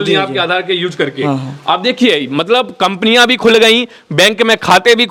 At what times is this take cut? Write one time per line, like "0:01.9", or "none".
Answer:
none